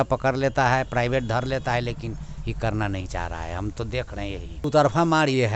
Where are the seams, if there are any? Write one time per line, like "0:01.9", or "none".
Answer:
0:04.6